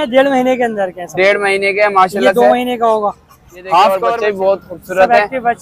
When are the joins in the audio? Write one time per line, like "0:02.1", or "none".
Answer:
0:04.1